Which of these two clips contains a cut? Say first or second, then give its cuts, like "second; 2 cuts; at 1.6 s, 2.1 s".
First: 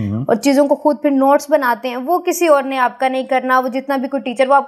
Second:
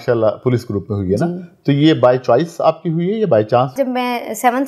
second; 1 cut; at 3.7 s